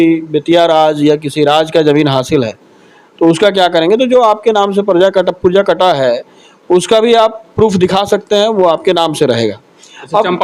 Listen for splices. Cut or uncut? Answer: uncut